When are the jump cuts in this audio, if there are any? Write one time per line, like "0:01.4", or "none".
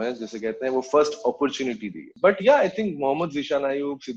none